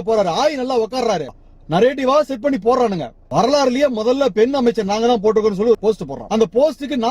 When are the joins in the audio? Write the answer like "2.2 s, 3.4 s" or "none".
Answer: 1.3 s, 3.2 s, 5.8 s